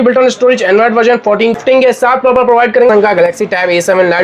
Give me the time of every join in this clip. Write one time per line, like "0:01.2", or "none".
0:01.6
0:02.9